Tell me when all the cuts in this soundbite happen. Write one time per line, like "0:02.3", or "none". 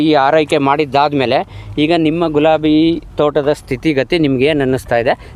none